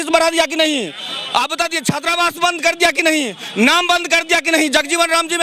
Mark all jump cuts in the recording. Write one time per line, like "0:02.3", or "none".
none